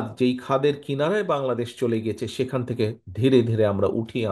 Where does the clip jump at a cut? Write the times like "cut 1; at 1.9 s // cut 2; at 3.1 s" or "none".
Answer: none